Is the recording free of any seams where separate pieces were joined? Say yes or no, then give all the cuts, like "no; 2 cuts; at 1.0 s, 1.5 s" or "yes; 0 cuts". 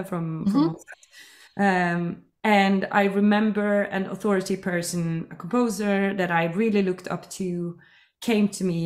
yes; 0 cuts